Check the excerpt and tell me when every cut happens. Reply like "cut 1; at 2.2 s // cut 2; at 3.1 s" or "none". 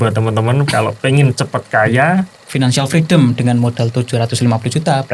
cut 1; at 2.4 s